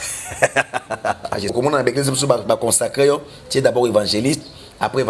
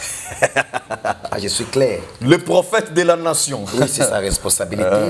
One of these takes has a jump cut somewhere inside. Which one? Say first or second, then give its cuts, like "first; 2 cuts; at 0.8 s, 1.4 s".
first; 1 cut; at 1.5 s